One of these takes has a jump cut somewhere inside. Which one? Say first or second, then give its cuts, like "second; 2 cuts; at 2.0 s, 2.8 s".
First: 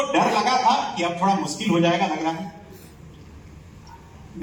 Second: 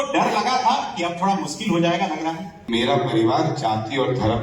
second; 1 cut; at 2.5 s